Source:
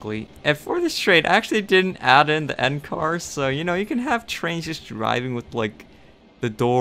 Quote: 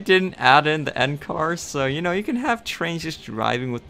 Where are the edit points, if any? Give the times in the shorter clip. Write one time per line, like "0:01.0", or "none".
none